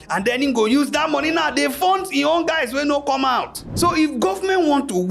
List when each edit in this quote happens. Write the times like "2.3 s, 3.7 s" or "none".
3.7 s